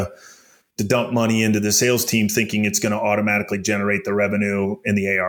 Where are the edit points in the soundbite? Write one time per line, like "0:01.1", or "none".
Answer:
none